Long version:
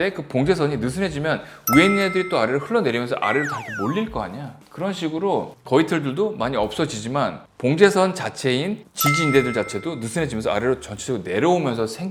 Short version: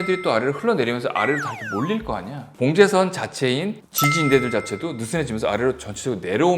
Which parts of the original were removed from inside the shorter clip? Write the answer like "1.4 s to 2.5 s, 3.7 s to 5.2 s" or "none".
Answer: 4.5 s to 7.5 s